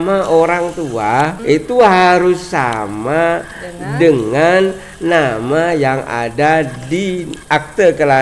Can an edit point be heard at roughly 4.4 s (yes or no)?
no